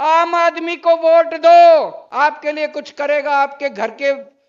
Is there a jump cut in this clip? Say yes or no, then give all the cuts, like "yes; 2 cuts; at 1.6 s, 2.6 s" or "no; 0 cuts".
yes; 1 cut; at 2.0 s